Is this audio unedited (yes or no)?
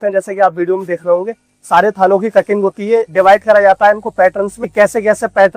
no